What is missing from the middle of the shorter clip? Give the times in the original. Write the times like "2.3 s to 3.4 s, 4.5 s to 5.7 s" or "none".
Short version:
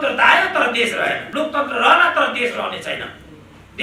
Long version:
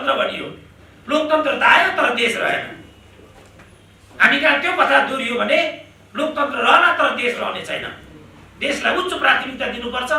2.7 s to 6.1 s